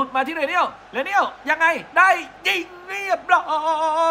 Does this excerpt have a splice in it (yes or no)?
no